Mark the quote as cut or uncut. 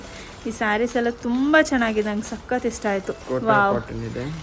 cut